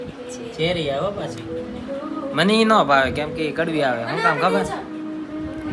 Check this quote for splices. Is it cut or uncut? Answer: uncut